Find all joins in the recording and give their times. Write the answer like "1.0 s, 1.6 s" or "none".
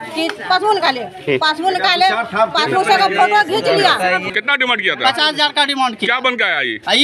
4.3 s